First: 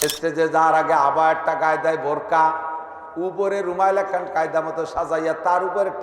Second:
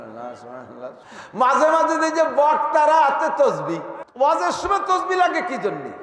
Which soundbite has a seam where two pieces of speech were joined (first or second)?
second